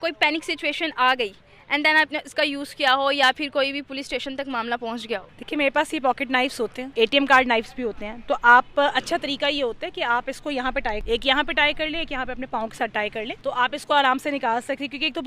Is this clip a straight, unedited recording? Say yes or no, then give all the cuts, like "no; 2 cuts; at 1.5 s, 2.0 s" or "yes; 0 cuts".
no; 4 cuts; at 5.3 s, 6.8 s, 11.0 s, 13.3 s